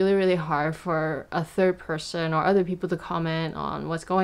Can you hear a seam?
no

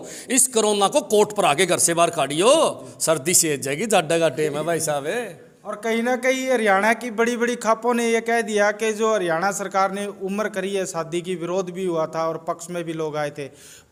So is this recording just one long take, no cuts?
yes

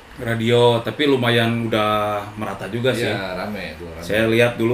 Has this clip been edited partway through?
no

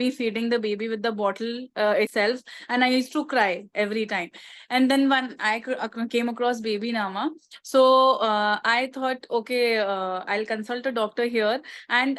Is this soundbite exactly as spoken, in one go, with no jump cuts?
yes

